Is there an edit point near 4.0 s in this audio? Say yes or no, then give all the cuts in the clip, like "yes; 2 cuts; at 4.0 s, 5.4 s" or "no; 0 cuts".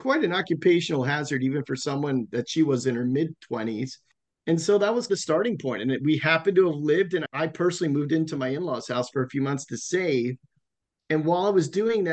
yes; 1 cut; at 4.0 s